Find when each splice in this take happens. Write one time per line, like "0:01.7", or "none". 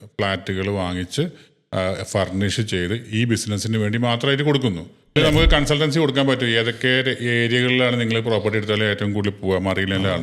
0:05.2

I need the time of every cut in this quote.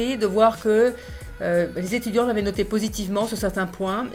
none

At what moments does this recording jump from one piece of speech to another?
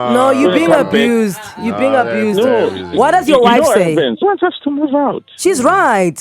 0:04.2

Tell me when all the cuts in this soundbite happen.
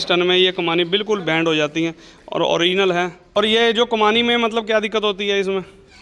0:03.4

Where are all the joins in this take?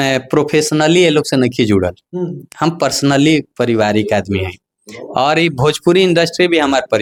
none

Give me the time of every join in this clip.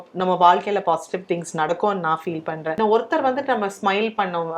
0:02.7

